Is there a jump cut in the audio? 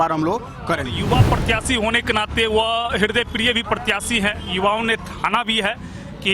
yes; 1 cut; at 1.0 s

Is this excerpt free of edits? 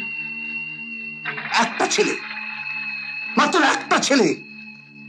yes; 0 cuts

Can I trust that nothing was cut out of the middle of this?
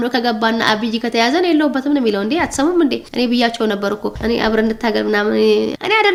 yes; 0 cuts

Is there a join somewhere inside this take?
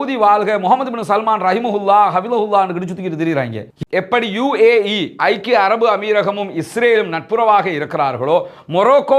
yes; 1 cut; at 3.8 s

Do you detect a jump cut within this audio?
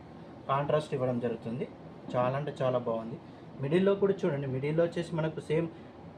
no; 0 cuts

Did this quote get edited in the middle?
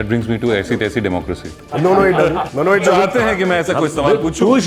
yes; 2 cuts; at 1.5 s, 2.6 s

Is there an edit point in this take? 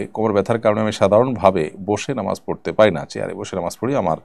no; 0 cuts

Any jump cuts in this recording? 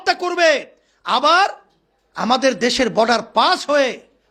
no; 0 cuts

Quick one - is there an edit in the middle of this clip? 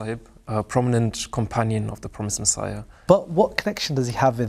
yes; 1 cut; at 3.0 s

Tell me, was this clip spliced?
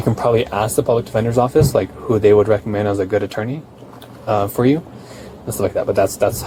no; 0 cuts

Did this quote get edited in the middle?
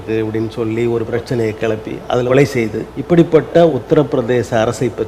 yes; 4 cuts; at 1.1 s, 2.3 s, 2.9 s, 3.7 s

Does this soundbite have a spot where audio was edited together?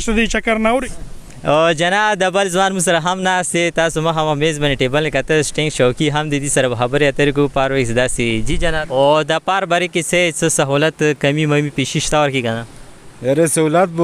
yes; 2 cuts; at 0.7 s, 8.7 s

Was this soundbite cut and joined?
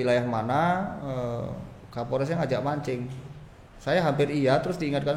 no; 0 cuts

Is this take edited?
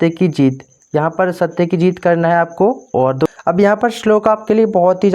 yes; 1 cut; at 3.4 s

